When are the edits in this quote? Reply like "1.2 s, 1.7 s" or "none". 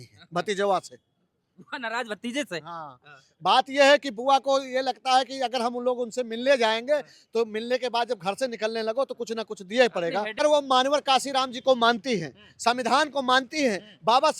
10.4 s